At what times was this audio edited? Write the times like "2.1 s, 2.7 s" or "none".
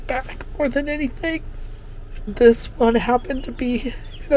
2.2 s